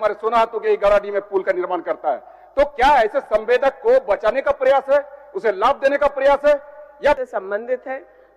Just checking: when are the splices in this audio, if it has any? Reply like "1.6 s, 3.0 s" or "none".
7.2 s